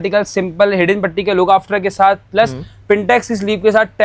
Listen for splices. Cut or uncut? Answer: uncut